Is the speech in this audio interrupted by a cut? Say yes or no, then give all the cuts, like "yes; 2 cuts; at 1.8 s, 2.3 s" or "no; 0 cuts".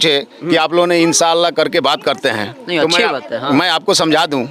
no; 0 cuts